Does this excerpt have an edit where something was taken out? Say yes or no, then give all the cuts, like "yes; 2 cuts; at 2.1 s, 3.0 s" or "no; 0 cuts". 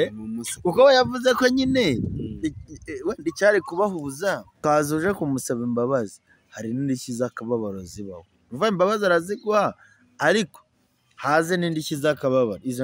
yes; 1 cut; at 4.5 s